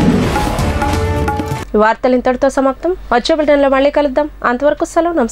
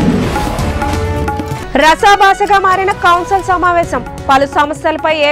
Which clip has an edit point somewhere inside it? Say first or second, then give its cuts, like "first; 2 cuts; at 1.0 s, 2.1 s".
second; 1 cut; at 1.4 s